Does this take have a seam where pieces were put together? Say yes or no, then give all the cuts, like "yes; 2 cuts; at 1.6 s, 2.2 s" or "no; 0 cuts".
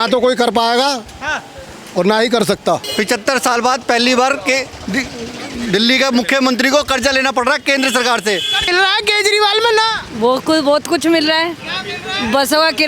yes; 2 cuts; at 2.9 s, 8.7 s